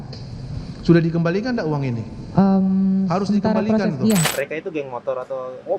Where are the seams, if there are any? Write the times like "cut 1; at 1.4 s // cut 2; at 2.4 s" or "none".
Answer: cut 1; at 4.3 s